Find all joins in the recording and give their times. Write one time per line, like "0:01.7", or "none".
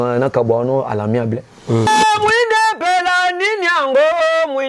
0:01.9